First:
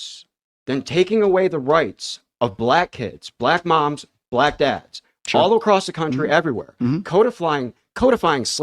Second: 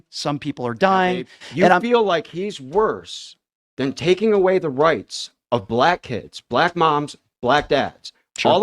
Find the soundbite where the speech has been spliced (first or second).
second